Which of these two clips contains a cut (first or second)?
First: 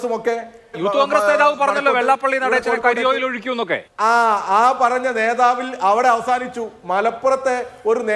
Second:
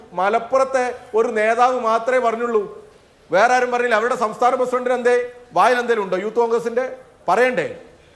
first